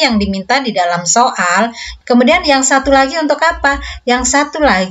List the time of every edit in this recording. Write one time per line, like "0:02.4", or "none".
0:01.9

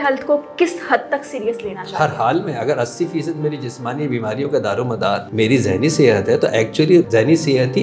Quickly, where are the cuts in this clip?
0:05.3
0:07.1

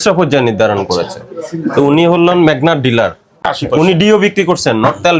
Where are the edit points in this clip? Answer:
0:03.4

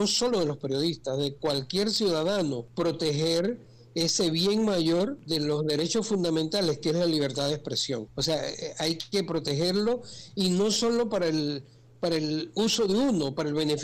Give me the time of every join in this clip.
0:02.7
0:05.2
0:08.1

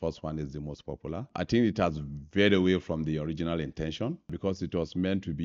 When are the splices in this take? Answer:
0:01.3
0:04.3

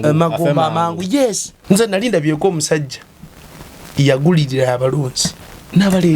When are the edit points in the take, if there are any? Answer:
0:01.5

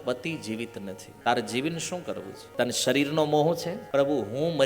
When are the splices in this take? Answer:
0:01.0
0:02.4
0:03.8

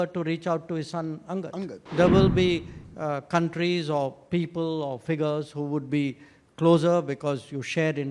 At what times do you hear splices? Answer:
0:01.8

